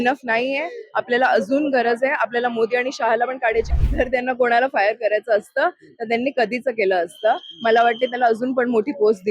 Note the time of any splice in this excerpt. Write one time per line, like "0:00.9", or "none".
0:03.7